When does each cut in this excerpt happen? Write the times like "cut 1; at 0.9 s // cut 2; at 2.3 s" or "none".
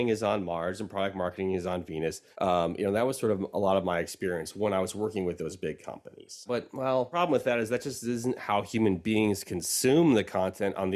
cut 1; at 2.2 s // cut 2; at 6.4 s